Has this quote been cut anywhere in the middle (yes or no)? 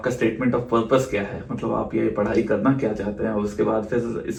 no